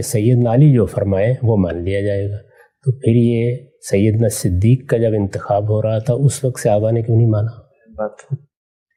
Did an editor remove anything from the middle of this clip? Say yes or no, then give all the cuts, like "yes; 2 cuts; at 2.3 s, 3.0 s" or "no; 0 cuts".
no; 0 cuts